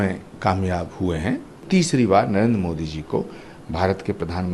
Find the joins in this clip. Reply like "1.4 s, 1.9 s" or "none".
1.6 s